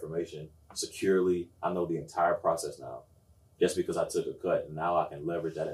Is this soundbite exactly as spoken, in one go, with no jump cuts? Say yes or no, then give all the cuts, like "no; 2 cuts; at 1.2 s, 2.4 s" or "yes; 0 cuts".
yes; 0 cuts